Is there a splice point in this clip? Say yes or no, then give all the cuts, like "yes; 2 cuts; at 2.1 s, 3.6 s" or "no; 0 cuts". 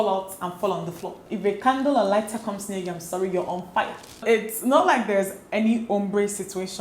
yes; 2 cuts; at 1.3 s, 4.1 s